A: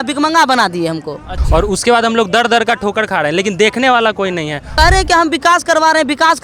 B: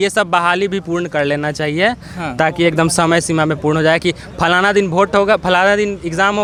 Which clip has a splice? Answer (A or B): A